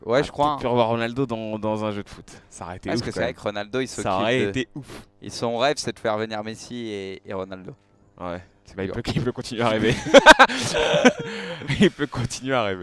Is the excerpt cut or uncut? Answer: cut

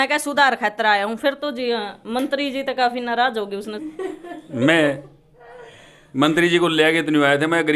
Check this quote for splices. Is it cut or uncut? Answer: uncut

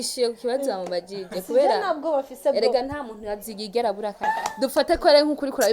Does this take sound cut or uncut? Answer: cut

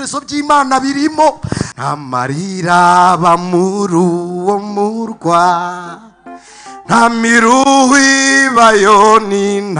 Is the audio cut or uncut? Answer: cut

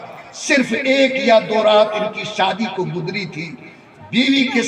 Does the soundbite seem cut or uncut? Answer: uncut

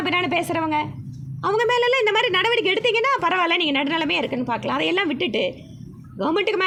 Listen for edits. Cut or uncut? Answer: uncut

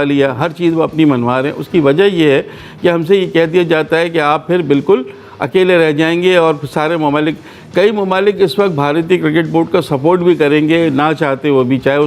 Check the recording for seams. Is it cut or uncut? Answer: uncut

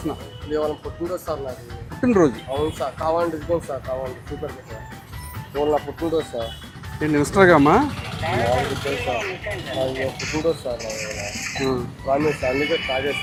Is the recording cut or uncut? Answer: uncut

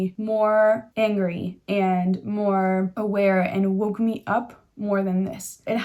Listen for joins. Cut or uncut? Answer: uncut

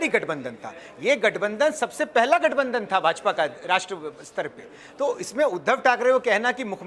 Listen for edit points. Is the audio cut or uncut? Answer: uncut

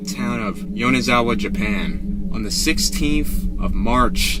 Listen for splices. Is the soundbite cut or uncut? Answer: cut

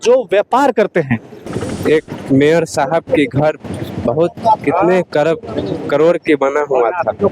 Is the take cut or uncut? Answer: cut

